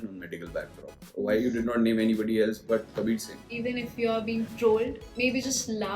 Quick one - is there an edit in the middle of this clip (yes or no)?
yes